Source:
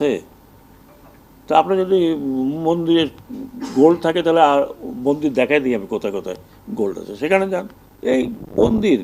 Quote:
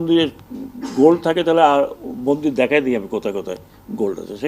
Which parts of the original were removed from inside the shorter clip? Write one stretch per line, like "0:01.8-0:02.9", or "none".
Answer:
none